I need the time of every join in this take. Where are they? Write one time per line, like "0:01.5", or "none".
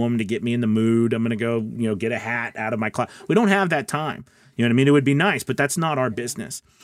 0:05.7

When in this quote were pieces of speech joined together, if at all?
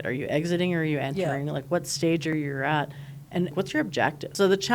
0:03.5

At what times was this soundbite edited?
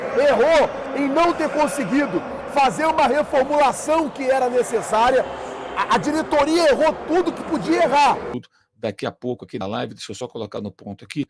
0:08.3

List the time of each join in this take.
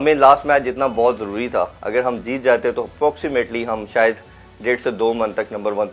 none

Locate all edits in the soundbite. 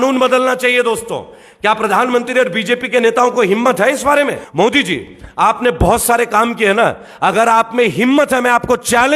0:04.4

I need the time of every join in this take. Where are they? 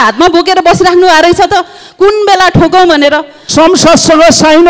0:03.4

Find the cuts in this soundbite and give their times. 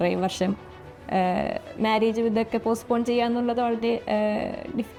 none

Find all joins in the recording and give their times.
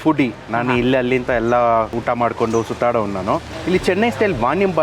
0:03.5

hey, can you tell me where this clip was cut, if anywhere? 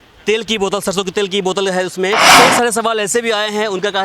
0:02.3

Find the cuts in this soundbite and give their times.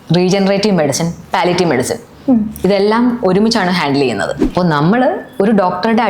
0:04.4

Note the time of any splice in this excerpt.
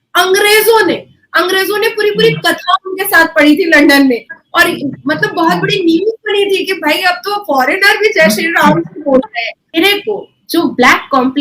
0:09.8

